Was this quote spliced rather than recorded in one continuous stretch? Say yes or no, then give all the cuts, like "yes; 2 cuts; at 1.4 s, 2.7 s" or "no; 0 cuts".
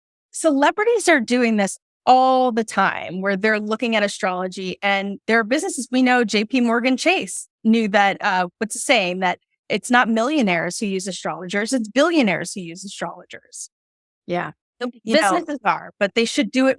no; 0 cuts